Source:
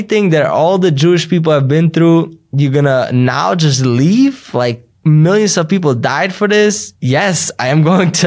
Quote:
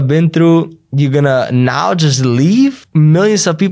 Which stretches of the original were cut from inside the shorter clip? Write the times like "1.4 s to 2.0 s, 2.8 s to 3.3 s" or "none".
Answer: 4.4 s to 4.9 s